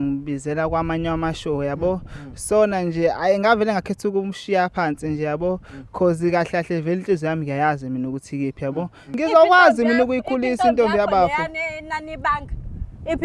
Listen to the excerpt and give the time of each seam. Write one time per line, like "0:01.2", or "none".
0:09.0